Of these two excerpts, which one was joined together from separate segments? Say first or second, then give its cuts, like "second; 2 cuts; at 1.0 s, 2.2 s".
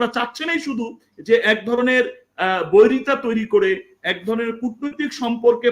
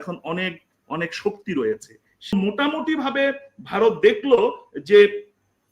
second; 1 cut; at 2.3 s